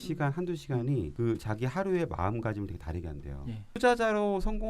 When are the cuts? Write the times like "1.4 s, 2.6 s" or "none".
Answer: 1.1 s, 3.6 s